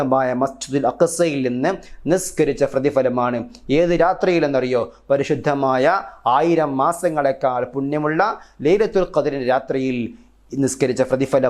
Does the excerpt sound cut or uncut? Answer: uncut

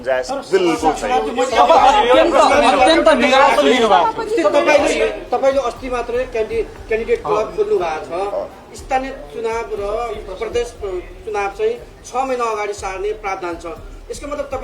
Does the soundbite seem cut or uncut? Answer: uncut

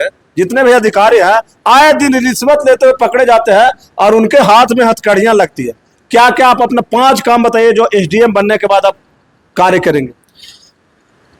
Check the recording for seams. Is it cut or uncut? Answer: uncut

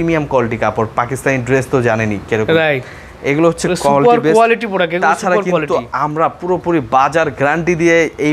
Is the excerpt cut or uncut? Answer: uncut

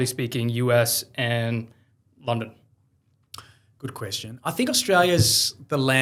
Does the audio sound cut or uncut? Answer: uncut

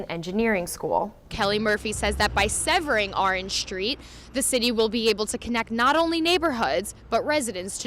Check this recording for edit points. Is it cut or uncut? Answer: cut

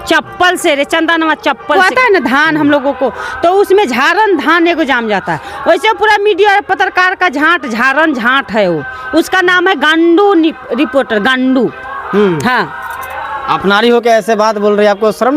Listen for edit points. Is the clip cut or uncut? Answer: cut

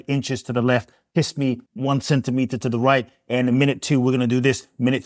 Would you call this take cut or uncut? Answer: cut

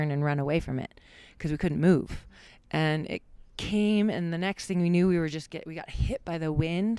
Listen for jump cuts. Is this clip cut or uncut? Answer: cut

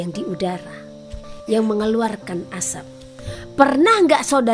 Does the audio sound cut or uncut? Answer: cut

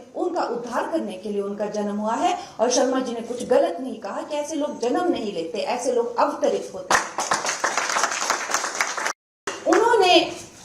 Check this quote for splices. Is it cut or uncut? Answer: cut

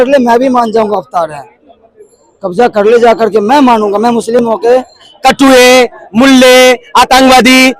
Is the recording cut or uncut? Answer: cut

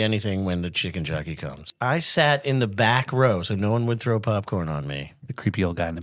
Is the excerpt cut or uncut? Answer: cut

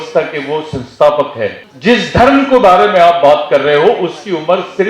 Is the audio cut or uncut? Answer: cut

